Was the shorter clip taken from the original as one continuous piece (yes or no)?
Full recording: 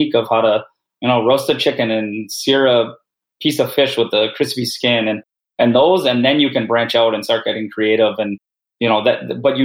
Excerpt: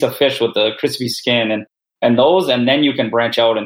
yes